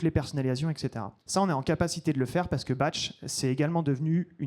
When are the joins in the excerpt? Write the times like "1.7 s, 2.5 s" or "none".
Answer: none